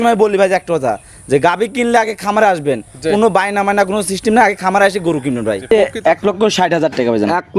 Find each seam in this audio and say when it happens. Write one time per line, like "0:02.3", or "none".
0:05.7